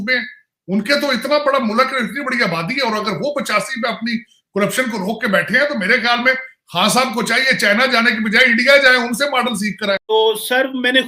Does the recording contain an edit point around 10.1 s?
yes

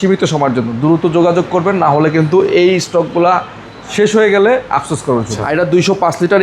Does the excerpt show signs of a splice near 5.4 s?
yes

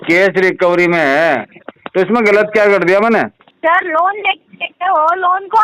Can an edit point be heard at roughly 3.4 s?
yes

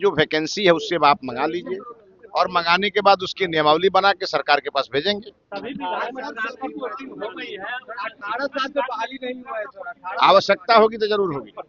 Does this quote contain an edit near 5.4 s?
no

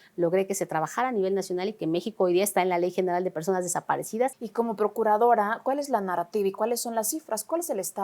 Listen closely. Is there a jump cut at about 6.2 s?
no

